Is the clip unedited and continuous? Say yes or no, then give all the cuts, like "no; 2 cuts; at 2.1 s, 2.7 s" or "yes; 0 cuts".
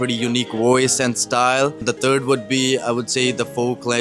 no; 1 cut; at 1.8 s